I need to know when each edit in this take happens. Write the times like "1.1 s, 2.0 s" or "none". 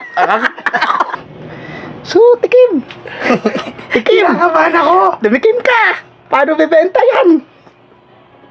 1.1 s